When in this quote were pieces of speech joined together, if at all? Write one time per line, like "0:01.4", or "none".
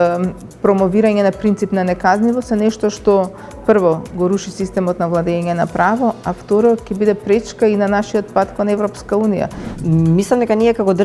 0:09.6